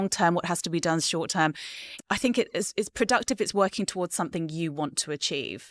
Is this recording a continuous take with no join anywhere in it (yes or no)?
no